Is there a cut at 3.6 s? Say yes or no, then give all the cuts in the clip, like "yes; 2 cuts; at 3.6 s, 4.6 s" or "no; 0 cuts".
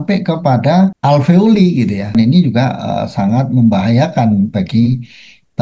no; 2 cuts; at 1.0 s, 2.1 s